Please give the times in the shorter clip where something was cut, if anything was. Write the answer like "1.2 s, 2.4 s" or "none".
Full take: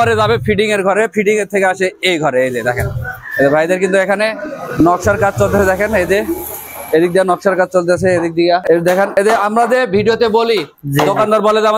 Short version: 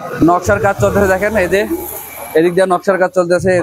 none